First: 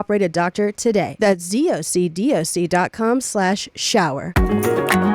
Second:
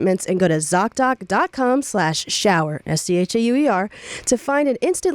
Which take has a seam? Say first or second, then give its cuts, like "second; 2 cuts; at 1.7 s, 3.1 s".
first; 2 cuts; at 1.1 s, 4.3 s